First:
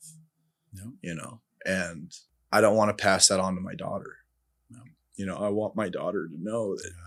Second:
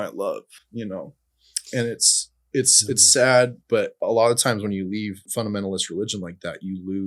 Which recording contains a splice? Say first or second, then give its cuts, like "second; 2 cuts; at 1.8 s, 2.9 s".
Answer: second; 2 cuts; at 3.9 s, 5.2 s